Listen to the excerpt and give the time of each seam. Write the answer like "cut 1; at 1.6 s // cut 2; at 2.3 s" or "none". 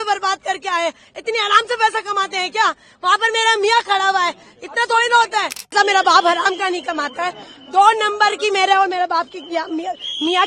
cut 1; at 5.7 s